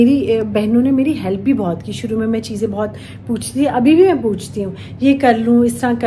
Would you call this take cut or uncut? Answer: uncut